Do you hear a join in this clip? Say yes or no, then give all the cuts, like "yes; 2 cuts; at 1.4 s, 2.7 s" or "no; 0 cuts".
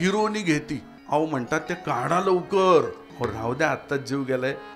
yes; 2 cuts; at 0.9 s, 3.0 s